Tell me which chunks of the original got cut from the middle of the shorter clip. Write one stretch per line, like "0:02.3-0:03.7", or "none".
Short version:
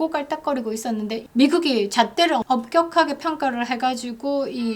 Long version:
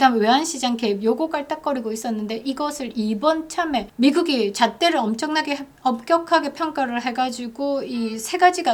0:02.4-0:03.9
0:05.1-0:05.8